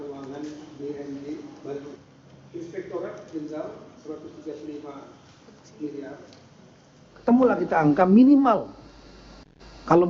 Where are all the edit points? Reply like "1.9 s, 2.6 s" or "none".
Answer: 7.3 s